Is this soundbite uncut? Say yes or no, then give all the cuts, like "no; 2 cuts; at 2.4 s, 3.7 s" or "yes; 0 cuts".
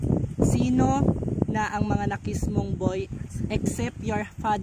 no; 1 cut; at 3.2 s